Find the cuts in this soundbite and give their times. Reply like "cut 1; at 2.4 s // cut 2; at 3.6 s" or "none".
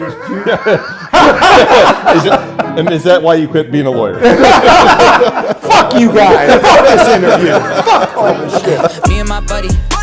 cut 1; at 9.1 s